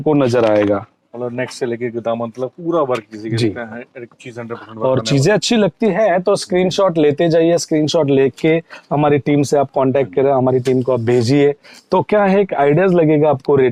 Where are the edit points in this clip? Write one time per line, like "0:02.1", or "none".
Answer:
none